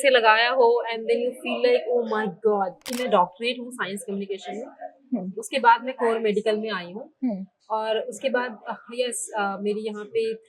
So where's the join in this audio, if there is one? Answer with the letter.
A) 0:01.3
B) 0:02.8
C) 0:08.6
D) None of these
B